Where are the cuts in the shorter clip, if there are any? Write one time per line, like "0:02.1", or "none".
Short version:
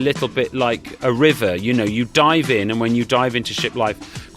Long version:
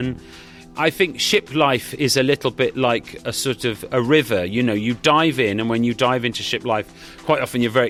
0:00.9